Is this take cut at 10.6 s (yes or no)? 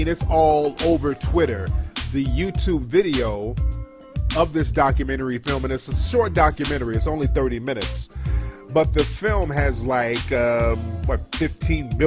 no